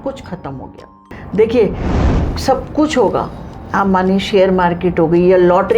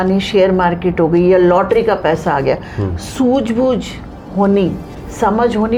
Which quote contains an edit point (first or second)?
first